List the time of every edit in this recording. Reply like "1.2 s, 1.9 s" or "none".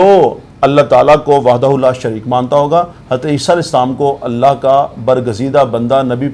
none